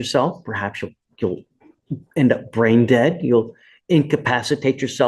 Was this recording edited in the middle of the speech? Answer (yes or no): no